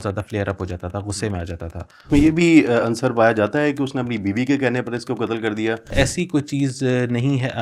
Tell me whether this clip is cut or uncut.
cut